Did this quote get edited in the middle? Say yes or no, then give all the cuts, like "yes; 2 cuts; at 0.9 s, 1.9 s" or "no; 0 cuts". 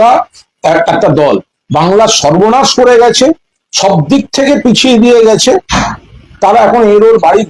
no; 0 cuts